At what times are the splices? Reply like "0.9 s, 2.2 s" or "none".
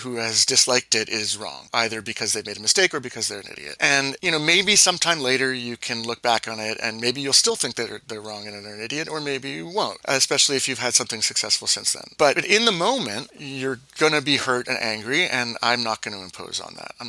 none